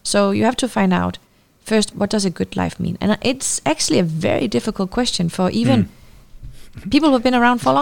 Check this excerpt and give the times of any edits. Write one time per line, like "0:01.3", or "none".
0:01.9

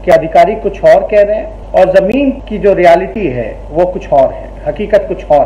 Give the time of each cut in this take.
0:01.5
0:02.5

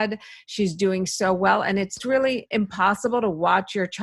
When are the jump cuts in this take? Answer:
0:02.0

